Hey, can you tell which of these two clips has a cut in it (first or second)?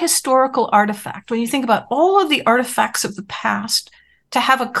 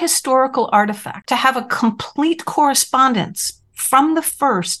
second